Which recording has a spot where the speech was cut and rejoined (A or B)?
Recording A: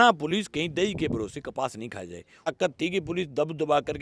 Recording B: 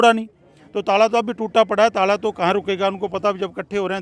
A